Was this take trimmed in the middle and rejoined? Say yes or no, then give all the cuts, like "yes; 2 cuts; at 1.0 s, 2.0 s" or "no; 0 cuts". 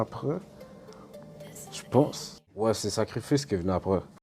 yes; 1 cut; at 2.7 s